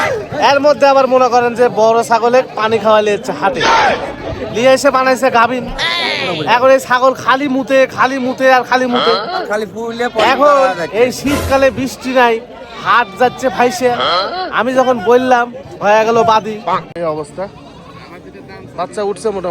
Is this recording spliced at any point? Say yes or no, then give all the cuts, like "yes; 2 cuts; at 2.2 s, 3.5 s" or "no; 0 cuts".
yes; 1 cut; at 16.9 s